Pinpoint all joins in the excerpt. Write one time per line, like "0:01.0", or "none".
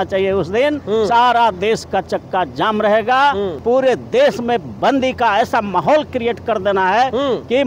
0:03.5